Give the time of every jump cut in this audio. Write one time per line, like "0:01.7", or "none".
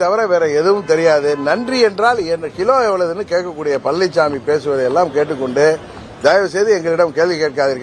none

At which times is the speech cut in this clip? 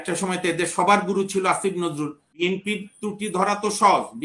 0:02.4

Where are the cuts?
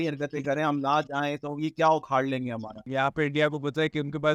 0:02.8

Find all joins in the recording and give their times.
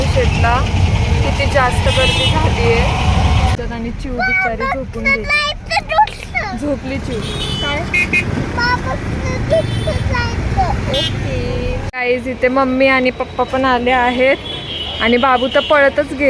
0:03.5
0:11.9

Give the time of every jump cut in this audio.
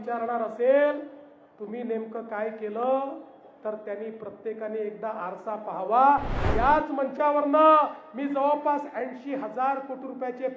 0:06.4

